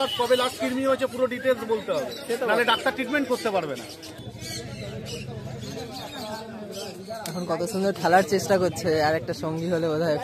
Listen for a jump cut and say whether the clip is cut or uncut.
cut